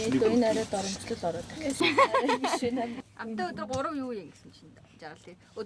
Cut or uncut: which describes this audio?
cut